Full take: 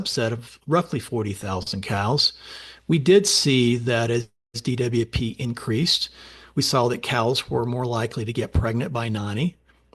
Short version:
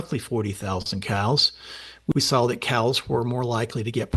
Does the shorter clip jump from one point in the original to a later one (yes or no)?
yes